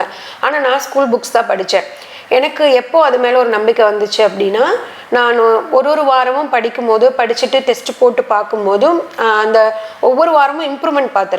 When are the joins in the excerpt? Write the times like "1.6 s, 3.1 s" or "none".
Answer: none